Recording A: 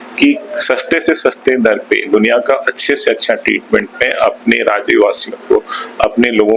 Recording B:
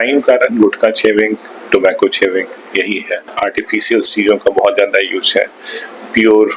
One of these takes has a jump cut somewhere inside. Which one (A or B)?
B